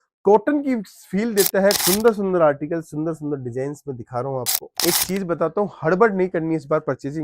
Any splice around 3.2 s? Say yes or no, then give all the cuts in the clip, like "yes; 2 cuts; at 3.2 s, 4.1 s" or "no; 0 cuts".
no; 2 cuts; at 1.8 s, 4.8 s